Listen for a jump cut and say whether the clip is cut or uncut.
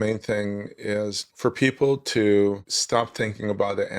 cut